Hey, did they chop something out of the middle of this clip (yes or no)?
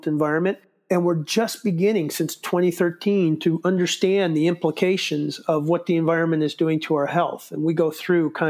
no